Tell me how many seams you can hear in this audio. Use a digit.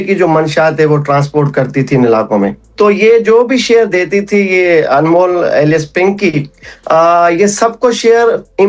1